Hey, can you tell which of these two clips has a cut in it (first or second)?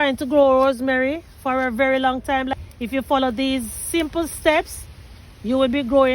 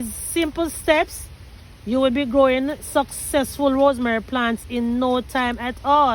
first